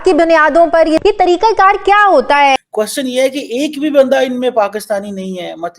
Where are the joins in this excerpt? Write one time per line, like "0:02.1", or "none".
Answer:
0:01.0
0:02.6